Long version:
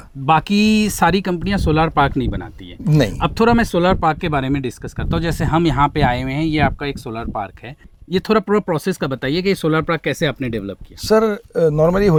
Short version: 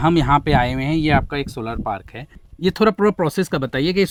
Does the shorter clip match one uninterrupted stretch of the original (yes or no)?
yes